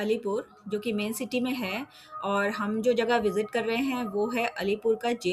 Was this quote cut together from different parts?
no; 0 cuts

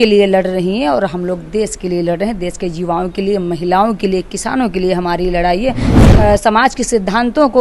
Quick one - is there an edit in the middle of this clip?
yes; 1 cut; at 6.1 s

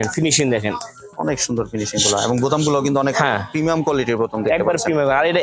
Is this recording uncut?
yes; 0 cuts

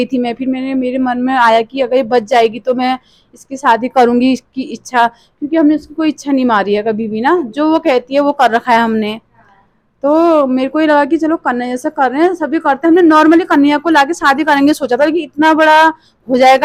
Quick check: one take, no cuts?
yes; 0 cuts

